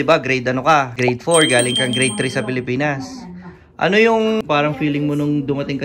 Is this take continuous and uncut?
no; 2 cuts; at 0.9 s, 4.4 s

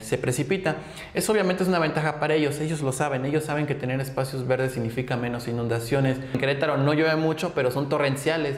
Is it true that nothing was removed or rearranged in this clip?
no; 1 cut; at 6.4 s

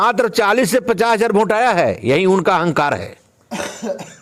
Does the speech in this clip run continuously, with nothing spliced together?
yes; 0 cuts

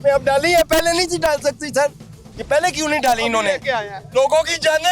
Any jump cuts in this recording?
yes; 1 cut; at 3.9 s

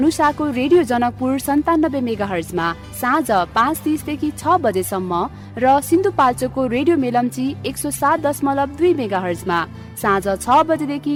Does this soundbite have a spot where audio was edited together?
no; 0 cuts

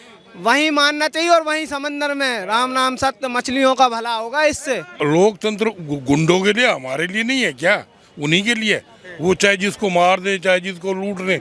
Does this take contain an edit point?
yes; 1 cut; at 4.9 s

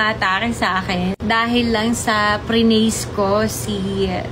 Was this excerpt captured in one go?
yes; 0 cuts

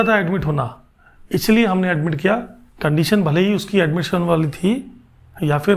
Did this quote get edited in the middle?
no; 0 cuts

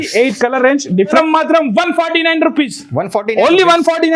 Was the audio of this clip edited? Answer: yes; 1 cut; at 1.2 s

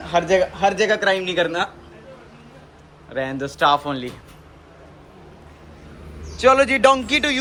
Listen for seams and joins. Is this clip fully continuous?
yes; 0 cuts

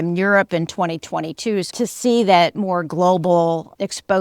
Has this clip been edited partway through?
yes; 1 cut; at 1.7 s

